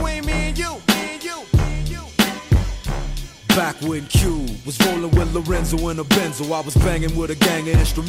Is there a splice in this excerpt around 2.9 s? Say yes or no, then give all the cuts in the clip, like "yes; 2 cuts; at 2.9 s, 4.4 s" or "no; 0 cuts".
no; 0 cuts